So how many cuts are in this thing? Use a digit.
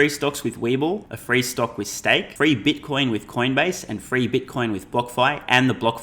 2